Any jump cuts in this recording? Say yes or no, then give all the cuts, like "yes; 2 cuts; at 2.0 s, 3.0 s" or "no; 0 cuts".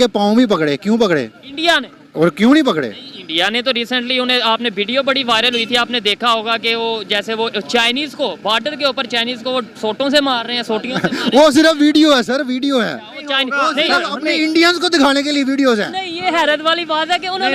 no; 0 cuts